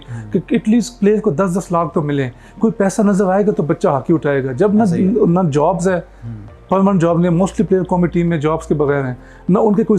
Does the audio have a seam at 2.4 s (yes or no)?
no